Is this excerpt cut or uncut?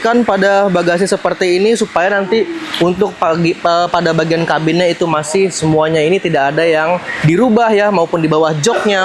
uncut